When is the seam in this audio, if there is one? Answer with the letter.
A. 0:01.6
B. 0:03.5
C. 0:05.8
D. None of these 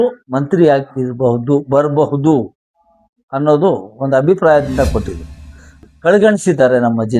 C